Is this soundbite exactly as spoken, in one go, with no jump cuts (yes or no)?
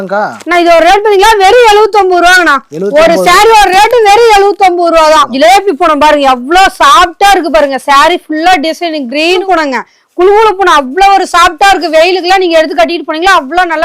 no